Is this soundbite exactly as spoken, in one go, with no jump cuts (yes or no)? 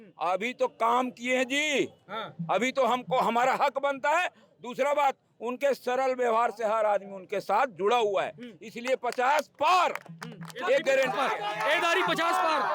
yes